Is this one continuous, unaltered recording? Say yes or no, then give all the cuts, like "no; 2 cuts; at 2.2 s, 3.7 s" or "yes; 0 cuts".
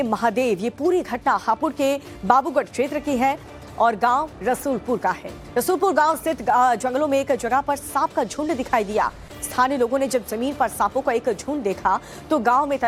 yes; 0 cuts